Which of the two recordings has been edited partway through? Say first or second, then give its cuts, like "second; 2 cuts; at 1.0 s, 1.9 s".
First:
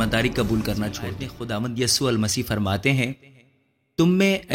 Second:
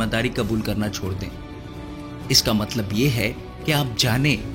first; 1 cut; at 1.3 s